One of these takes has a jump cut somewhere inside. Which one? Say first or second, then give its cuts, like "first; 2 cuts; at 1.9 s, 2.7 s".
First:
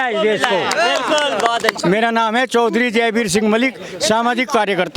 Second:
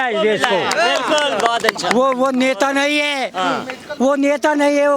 first; 1 cut; at 1.8 s